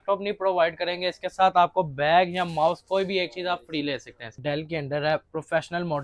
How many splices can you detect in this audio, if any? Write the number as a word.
one